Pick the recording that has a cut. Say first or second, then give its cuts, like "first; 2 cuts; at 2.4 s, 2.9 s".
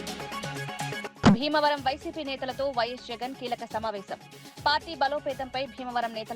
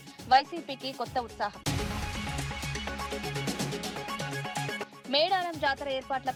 first; 1 cut; at 1.0 s